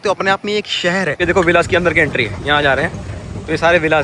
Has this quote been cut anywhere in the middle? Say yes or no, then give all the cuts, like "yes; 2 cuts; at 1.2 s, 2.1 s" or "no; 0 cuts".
yes; 1 cut; at 1.1 s